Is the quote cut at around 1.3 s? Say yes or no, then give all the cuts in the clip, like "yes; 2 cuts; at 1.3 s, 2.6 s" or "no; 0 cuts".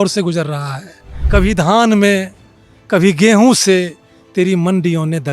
yes; 1 cut; at 1.3 s